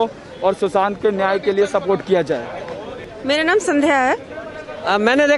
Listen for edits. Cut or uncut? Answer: uncut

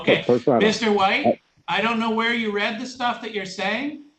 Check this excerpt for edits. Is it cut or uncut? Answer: cut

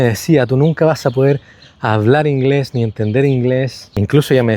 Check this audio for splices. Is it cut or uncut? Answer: uncut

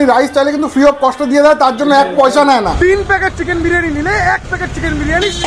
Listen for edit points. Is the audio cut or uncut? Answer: cut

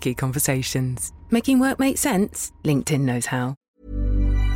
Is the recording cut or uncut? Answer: cut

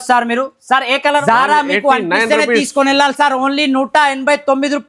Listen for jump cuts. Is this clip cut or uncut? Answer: cut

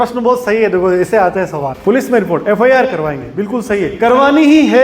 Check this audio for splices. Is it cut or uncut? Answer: cut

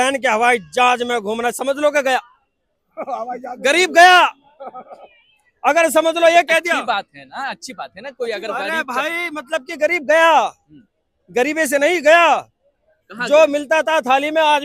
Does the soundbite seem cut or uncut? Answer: uncut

